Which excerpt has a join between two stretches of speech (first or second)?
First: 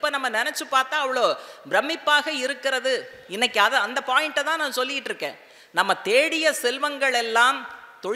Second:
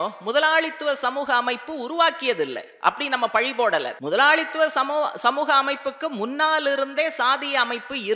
second